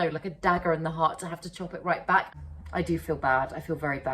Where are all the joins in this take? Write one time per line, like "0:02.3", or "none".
0:02.4